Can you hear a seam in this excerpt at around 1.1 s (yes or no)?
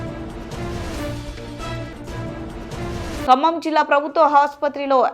no